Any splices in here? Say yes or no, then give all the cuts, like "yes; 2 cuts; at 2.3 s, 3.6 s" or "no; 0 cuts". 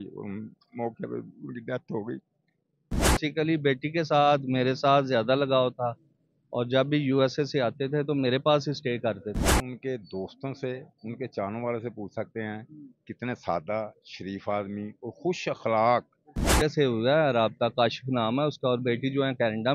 yes; 3 cuts; at 3.2 s, 9.7 s, 16.6 s